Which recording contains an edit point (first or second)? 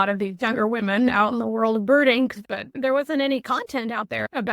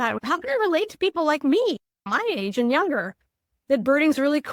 first